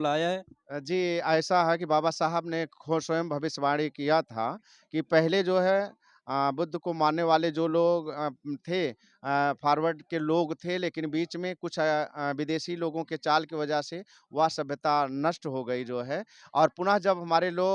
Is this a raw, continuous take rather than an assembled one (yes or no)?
yes